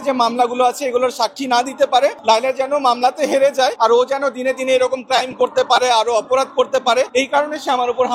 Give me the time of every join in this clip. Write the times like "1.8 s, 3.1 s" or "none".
2.2 s, 3.7 s, 7.1 s